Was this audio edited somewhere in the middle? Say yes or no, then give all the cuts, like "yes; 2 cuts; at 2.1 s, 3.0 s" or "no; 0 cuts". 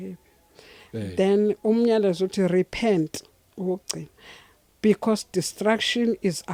no; 0 cuts